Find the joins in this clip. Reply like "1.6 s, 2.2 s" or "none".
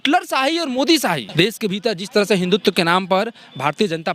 1.2 s